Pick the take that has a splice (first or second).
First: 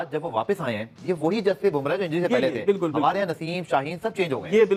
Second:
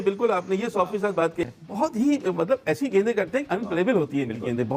second